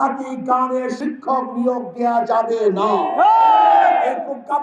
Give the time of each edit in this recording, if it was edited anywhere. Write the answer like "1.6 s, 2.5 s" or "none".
1.0 s